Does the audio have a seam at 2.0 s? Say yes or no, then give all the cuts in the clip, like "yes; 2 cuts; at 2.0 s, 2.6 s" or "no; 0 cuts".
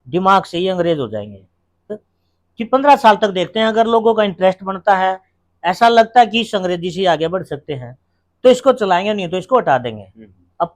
yes; 1 cut; at 2.0 s